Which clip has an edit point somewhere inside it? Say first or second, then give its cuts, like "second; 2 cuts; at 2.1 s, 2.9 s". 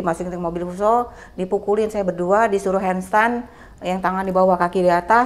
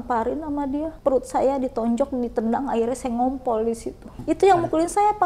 second; 2 cuts; at 0.9 s, 4.1 s